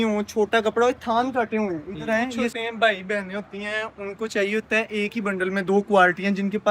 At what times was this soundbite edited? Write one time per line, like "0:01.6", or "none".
0:02.6